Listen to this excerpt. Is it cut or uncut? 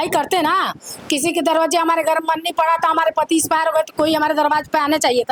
uncut